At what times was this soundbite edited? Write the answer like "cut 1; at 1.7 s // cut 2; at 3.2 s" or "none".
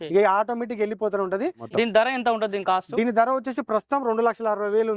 cut 1; at 1.6 s